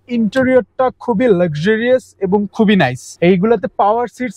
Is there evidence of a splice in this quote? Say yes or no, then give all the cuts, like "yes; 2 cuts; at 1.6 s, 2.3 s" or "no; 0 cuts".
no; 0 cuts